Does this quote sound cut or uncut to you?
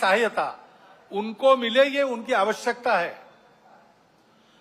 uncut